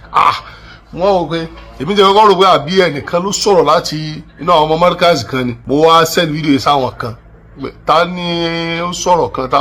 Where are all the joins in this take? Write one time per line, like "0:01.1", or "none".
0:05.6